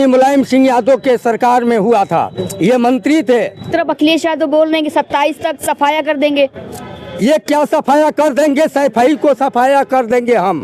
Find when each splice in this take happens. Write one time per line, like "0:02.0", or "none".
0:03.7